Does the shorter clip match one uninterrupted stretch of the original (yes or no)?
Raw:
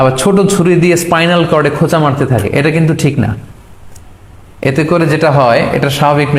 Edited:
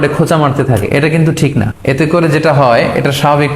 no